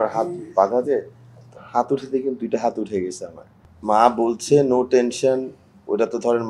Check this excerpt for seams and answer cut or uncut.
uncut